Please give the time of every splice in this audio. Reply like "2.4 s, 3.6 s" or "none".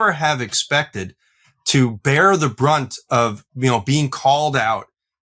none